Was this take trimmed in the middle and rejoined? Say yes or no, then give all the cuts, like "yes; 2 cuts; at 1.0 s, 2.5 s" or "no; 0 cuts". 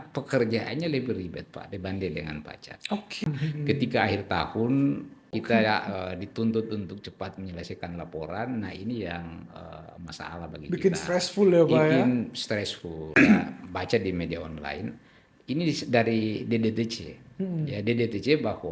yes; 3 cuts; at 3.2 s, 5.4 s, 13.1 s